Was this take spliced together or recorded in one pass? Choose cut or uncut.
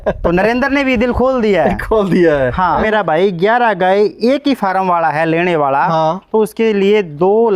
cut